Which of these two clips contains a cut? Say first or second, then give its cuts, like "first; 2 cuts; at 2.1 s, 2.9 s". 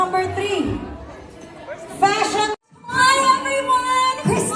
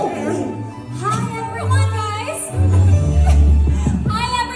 first; 1 cut; at 2.7 s